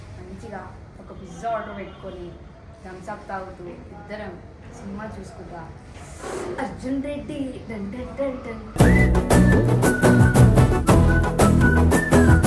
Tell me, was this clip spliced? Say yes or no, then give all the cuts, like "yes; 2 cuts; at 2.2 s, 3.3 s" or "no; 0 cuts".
no; 0 cuts